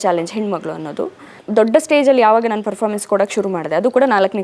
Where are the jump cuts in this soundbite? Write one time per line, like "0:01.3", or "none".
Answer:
0:01.4

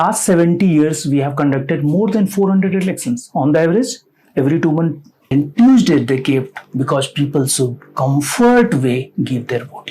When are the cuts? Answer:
0:05.1

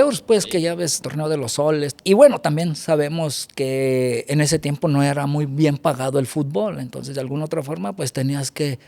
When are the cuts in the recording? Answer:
0:01.0
0:01.9

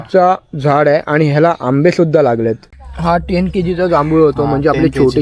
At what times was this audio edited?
0:02.7

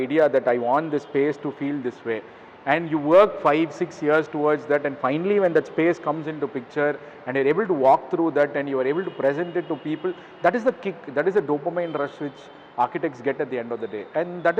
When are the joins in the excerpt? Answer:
none

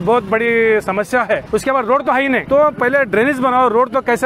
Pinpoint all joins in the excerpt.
0:01.4
0:02.4

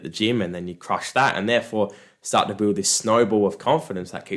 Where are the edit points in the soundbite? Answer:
none

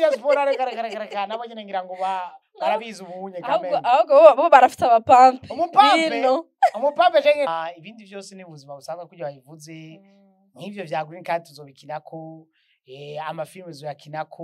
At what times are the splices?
0:07.5

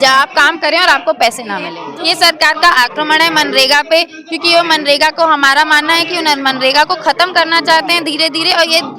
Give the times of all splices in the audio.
0:01.8

